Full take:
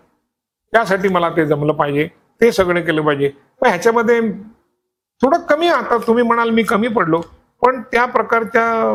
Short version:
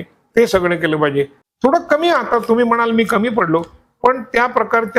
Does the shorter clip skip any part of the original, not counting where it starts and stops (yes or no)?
yes